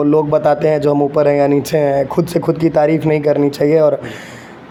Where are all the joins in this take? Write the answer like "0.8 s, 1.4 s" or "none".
none